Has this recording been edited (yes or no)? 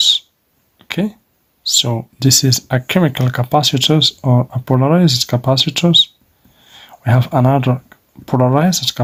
no